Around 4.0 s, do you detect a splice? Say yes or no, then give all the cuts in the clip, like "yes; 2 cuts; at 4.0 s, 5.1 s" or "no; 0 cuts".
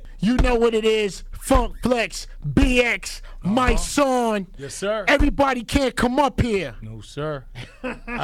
no; 0 cuts